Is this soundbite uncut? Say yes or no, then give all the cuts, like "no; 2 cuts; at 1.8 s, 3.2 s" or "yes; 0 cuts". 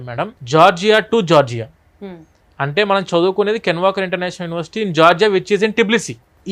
yes; 0 cuts